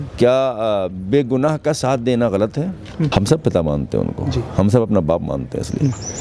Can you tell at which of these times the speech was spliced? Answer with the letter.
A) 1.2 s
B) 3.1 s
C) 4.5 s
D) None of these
B